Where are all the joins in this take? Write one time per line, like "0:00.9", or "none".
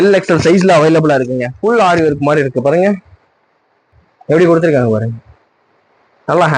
none